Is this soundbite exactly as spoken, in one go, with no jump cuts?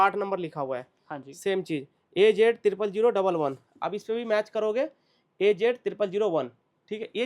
yes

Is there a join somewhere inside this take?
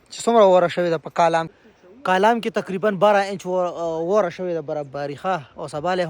yes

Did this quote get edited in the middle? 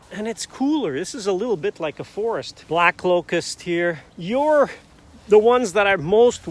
no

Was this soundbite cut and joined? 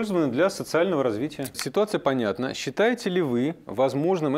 yes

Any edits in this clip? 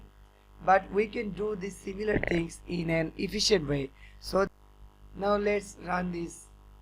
yes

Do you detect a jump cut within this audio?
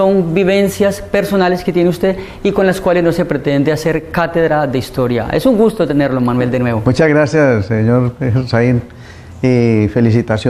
no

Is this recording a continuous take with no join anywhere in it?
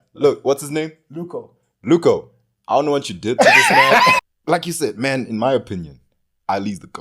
no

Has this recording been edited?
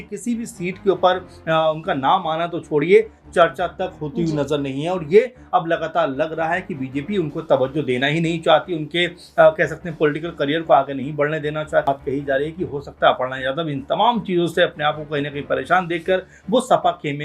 yes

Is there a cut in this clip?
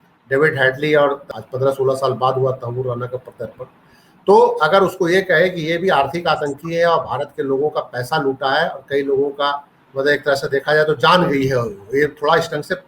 yes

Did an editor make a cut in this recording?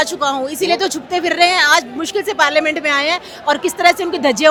no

